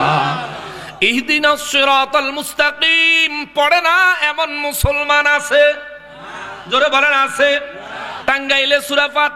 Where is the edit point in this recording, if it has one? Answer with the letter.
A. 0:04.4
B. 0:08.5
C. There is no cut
C